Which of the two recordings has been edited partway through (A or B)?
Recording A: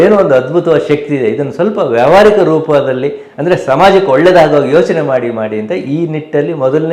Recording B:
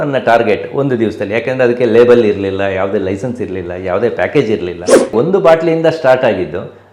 B